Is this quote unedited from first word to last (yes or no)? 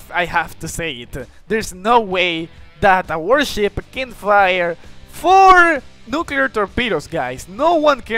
yes